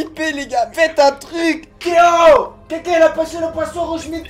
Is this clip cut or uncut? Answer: cut